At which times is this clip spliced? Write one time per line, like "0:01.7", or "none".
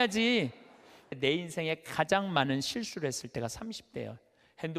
0:01.0